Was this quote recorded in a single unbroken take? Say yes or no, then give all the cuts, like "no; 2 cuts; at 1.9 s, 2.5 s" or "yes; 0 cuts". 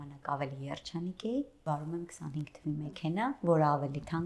no; 1 cut; at 1.6 s